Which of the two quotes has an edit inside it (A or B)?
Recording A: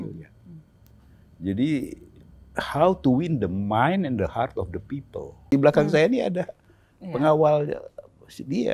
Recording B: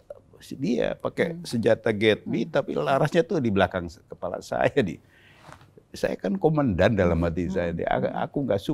A